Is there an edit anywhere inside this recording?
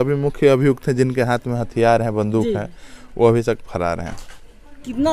no; 0 cuts

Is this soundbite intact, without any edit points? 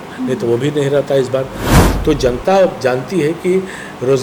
yes; 0 cuts

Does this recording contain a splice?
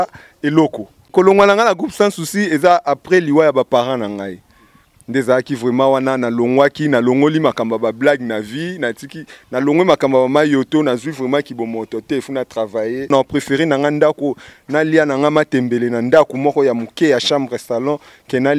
yes; 2 cuts; at 1.0 s, 13.1 s

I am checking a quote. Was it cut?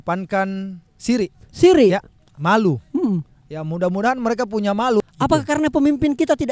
yes; 1 cut; at 5.0 s

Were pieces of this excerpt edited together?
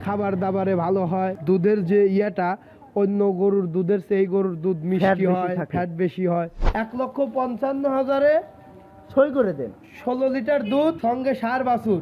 yes; 3 cuts; at 1.4 s, 6.6 s, 11.0 s

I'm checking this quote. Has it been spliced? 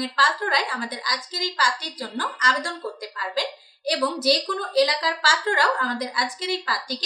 no; 0 cuts

